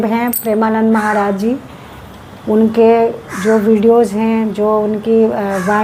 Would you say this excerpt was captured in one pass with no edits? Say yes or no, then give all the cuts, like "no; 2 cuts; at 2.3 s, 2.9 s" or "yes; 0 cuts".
yes; 0 cuts